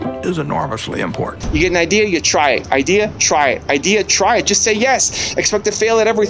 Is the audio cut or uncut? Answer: cut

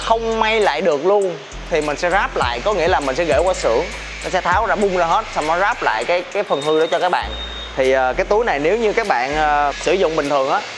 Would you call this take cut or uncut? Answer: uncut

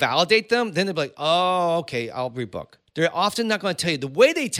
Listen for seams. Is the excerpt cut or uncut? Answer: cut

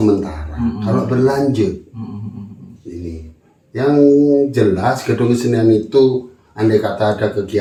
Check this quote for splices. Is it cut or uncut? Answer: uncut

